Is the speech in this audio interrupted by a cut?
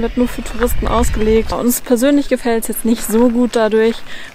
yes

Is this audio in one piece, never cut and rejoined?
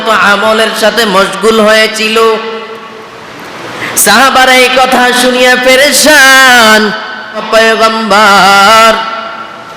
no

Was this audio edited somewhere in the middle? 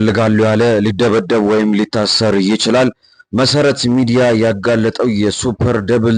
no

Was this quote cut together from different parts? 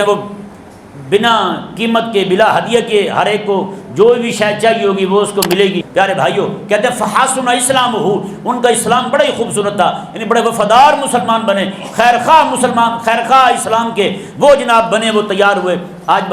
yes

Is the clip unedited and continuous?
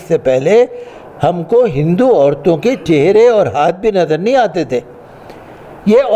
yes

